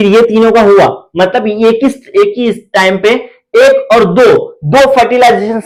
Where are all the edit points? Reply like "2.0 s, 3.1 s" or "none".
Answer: none